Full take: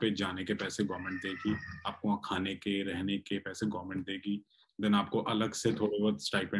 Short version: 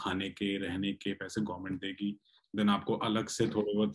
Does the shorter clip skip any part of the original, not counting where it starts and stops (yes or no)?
no